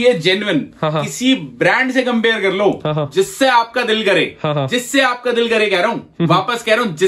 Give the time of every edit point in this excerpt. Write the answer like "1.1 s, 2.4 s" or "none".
none